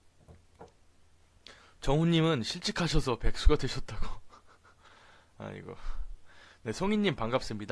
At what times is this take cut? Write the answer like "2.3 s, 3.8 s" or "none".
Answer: 6.6 s